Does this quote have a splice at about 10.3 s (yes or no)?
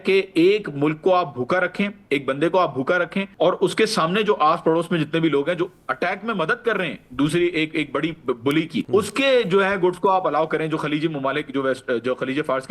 no